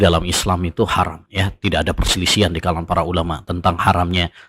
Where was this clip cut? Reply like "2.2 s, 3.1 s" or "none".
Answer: 1.2 s